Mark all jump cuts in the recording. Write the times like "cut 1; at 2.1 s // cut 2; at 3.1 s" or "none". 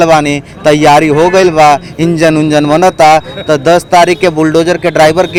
none